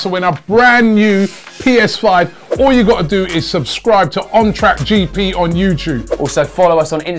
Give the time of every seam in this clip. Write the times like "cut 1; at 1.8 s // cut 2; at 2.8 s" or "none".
none